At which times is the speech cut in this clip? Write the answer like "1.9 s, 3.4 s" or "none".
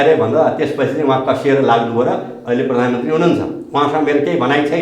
none